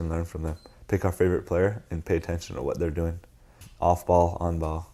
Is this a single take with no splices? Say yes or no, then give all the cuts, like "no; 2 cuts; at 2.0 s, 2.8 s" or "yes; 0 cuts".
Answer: no; 1 cut; at 3.6 s